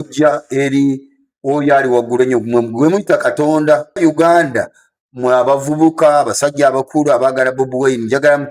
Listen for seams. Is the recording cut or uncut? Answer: cut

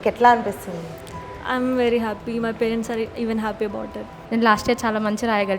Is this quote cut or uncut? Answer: cut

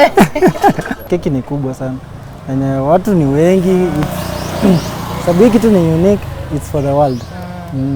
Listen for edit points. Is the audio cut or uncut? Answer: cut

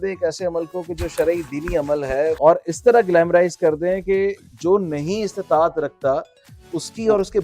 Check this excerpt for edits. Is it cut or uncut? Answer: cut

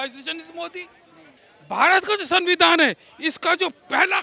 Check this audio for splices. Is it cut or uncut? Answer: cut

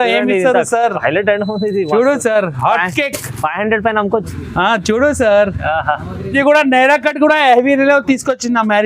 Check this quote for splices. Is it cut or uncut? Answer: cut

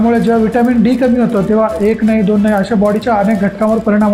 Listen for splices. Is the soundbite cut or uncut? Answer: uncut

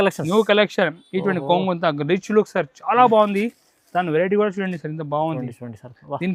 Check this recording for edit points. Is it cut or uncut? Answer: uncut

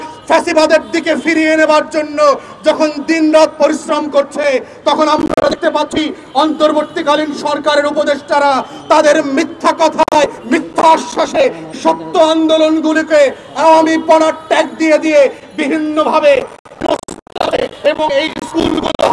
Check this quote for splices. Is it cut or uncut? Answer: uncut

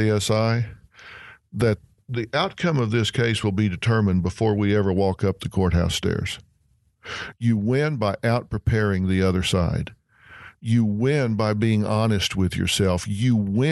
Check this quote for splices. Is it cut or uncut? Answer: cut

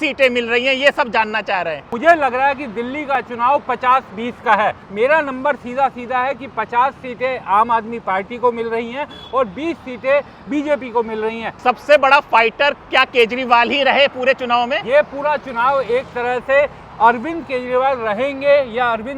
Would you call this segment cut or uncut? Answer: cut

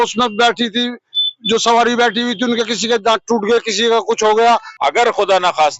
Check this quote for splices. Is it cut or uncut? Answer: cut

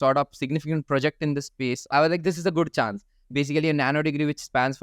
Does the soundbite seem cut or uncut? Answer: cut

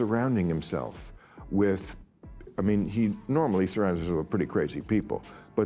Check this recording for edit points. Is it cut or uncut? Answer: uncut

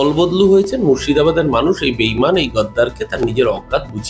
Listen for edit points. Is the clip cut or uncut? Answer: uncut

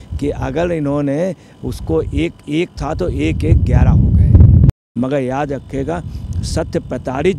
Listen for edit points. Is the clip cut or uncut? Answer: cut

